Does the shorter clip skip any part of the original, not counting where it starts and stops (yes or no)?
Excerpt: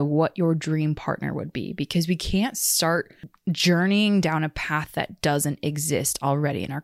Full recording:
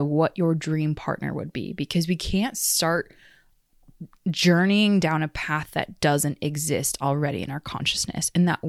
yes